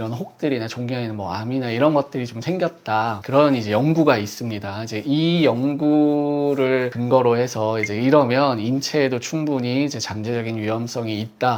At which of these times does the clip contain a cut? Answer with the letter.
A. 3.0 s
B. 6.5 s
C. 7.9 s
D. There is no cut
D